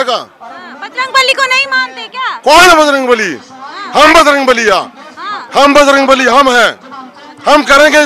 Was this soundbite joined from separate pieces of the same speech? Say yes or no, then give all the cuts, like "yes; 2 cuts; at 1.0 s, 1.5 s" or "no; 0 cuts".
no; 0 cuts